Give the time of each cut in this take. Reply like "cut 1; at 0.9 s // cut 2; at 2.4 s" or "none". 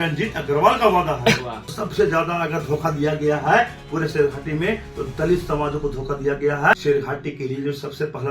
cut 1; at 1.7 s // cut 2; at 6.7 s